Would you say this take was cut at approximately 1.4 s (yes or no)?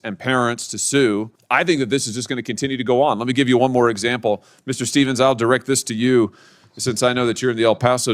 yes